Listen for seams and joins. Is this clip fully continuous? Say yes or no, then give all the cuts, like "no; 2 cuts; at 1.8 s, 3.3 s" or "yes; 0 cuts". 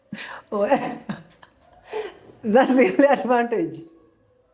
yes; 0 cuts